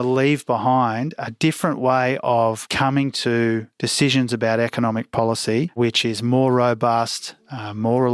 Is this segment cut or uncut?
cut